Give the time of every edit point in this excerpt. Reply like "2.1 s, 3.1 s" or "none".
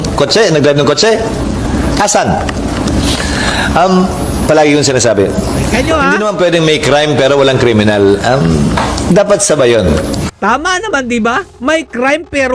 none